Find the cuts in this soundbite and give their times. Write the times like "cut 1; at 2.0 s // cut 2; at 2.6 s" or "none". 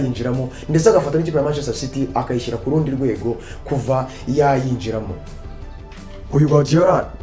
none